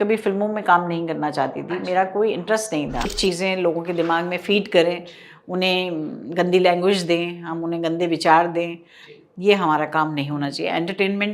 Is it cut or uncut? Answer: cut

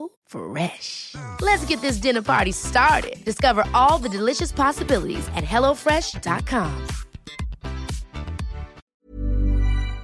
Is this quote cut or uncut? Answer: cut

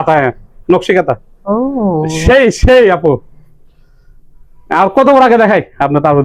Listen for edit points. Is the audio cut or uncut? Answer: uncut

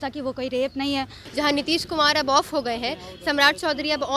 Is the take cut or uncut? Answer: cut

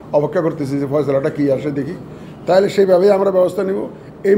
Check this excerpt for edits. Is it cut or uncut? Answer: uncut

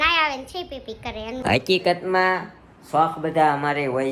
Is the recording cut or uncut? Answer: cut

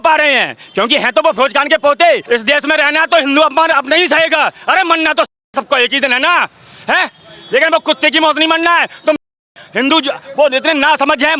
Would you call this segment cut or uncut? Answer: cut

